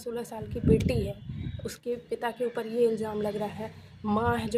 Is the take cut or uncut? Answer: uncut